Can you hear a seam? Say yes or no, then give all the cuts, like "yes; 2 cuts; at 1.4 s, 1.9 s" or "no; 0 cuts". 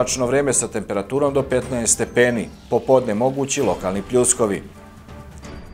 yes; 1 cut; at 4.7 s